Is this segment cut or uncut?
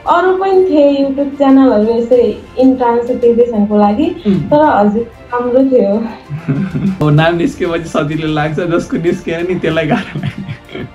cut